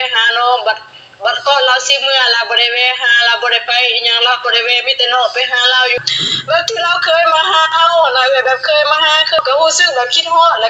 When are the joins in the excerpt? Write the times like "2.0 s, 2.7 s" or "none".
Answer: 6.0 s, 9.4 s